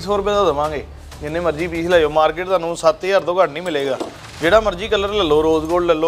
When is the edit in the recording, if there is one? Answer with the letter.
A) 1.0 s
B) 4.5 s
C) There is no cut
C